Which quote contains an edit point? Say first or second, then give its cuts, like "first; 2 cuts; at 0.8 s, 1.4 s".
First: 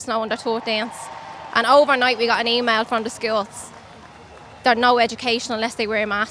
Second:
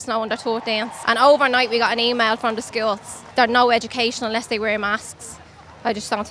second; 2 cuts; at 0.9 s, 3.1 s